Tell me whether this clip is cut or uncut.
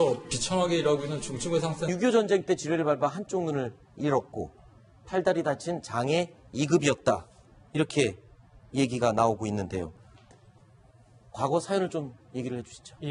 uncut